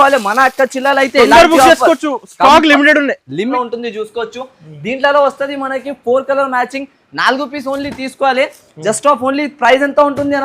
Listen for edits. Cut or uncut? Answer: cut